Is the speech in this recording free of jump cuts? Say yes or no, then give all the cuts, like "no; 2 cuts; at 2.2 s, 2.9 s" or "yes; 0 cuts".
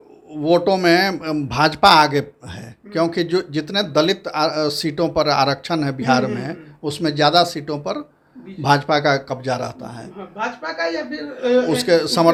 yes; 0 cuts